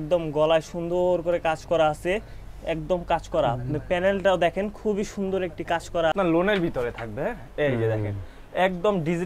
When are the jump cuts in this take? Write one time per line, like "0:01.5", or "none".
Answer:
0:06.1